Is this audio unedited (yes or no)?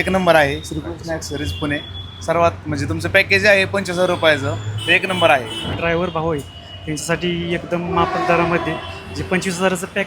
no